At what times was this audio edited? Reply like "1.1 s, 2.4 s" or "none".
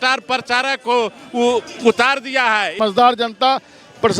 3.0 s